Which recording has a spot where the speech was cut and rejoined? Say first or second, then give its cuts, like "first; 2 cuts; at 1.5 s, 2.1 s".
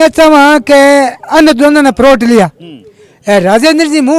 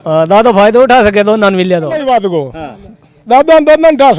second; 1 cut; at 2.0 s